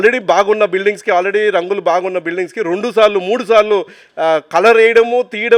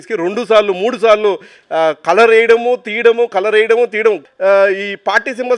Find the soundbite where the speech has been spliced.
second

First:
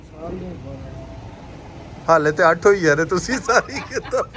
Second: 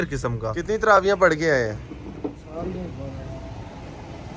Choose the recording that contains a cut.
second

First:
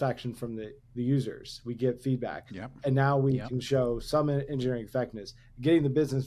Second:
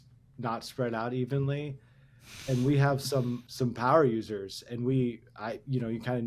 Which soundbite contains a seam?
second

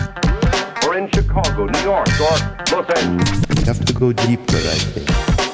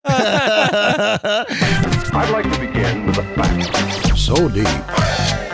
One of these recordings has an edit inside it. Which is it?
second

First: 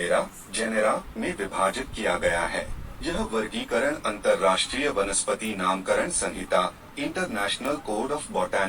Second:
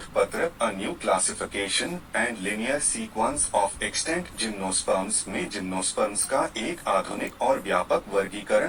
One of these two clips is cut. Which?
first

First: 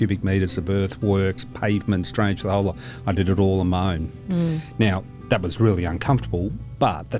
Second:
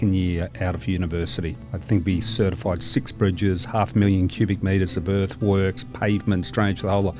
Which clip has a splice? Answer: second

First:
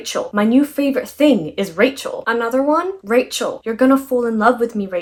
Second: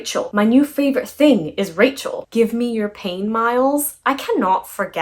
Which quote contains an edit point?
second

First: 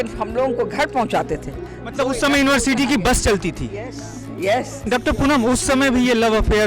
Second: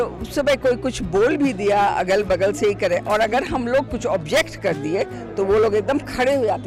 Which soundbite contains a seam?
first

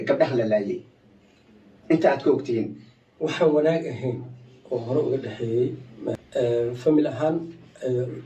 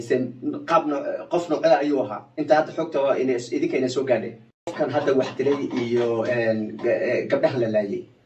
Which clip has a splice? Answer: second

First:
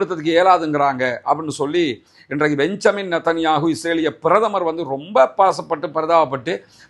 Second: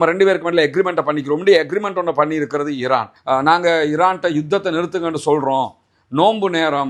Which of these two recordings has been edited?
second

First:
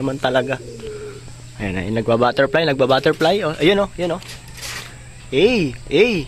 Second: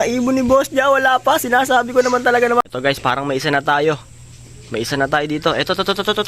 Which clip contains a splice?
second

